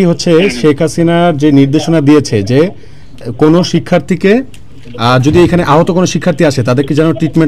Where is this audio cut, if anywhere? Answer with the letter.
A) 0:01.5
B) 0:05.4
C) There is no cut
C